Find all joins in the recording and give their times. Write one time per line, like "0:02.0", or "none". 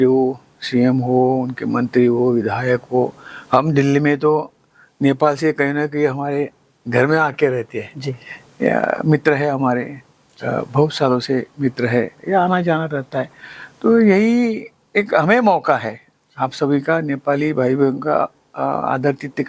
none